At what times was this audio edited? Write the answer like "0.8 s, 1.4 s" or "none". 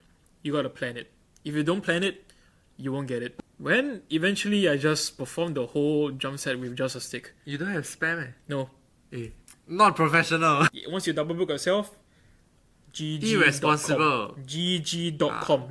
3.5 s, 10.8 s